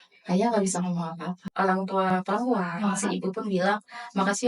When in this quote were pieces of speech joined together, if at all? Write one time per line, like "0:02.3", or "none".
0:01.4

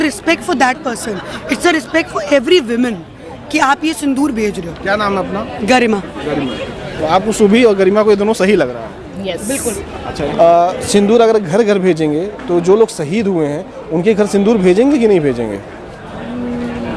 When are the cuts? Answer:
0:10.0

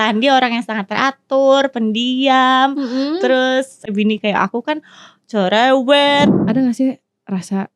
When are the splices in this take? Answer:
0:03.9
0:06.4

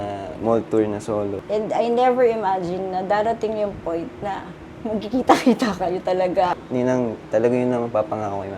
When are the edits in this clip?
0:01.4
0:06.5

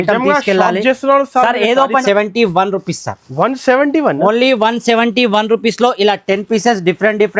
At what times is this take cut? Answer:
0:02.0

